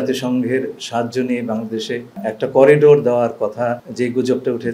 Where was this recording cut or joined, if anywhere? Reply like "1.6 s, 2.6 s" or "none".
2.2 s, 3.9 s